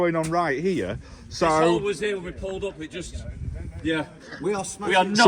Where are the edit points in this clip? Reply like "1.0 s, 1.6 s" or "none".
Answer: none

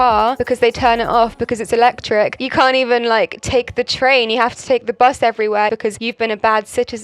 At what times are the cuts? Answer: 2.4 s, 5.7 s

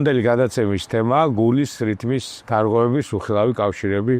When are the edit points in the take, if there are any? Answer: 2.3 s

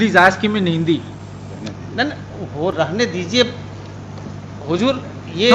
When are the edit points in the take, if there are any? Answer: 1.1 s

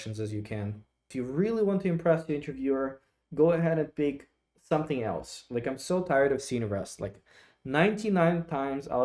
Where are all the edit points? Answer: 1.1 s

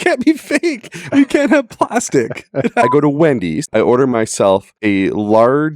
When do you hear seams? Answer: 2.8 s, 3.6 s, 4.7 s

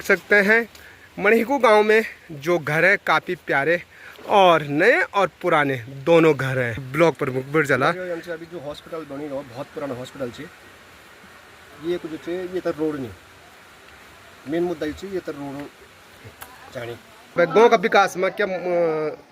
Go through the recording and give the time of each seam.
6.8 s, 17.3 s

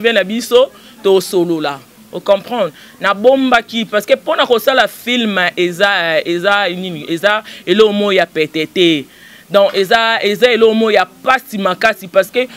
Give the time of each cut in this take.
none

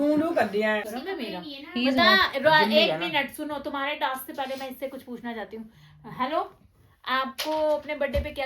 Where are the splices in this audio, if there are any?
0.9 s

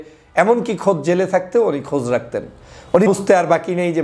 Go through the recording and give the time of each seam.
3.1 s

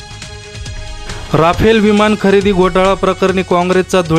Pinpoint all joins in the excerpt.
1.0 s

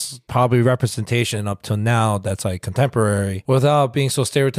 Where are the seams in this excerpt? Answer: 3.4 s

